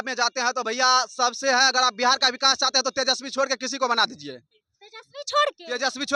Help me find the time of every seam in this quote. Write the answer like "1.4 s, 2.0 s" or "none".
none